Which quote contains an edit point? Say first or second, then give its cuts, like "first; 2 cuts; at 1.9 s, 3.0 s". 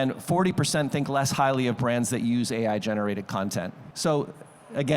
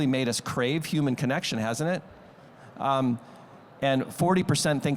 first; 1 cut; at 3.8 s